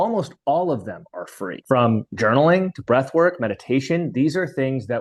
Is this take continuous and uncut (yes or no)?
yes